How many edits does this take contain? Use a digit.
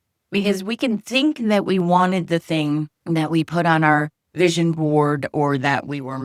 1